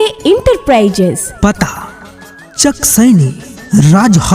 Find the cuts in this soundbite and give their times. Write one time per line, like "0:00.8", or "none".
0:01.3